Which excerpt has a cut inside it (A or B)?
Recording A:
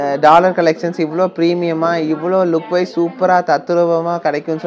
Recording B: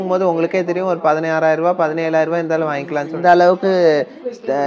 B